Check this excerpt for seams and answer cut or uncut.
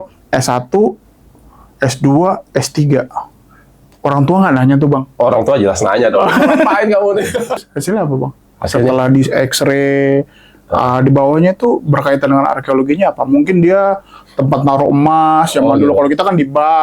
cut